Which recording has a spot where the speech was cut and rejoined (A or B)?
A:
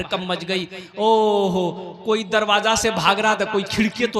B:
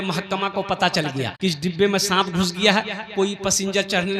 B